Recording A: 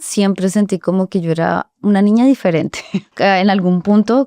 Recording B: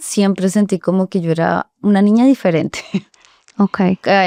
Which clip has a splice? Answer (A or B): A